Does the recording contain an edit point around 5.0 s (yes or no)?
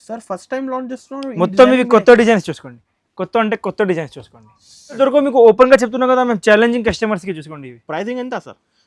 yes